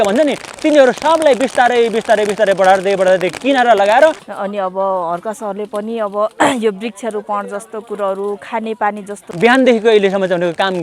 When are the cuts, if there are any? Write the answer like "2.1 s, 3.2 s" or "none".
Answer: 4.2 s, 9.3 s